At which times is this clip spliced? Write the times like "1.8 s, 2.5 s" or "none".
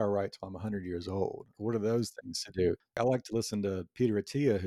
1.5 s, 3.0 s